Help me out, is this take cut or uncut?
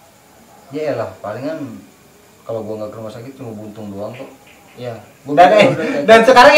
uncut